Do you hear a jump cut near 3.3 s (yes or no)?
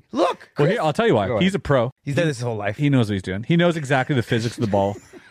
no